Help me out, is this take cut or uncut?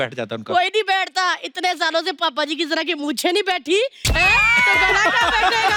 uncut